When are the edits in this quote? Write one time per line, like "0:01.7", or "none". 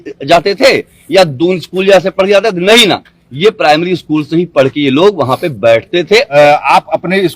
0:06.3